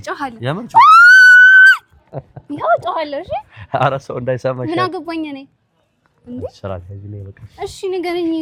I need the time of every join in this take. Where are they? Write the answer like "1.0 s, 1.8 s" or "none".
none